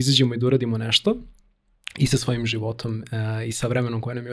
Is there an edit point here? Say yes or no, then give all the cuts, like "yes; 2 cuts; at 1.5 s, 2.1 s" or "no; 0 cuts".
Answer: no; 0 cuts